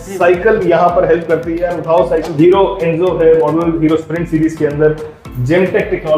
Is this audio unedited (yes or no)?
no